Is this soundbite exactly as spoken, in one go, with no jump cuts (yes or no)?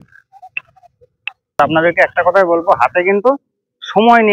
no